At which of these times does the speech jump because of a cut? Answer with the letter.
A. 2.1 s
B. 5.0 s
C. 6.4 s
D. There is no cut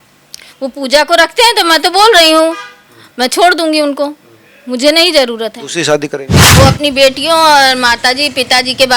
C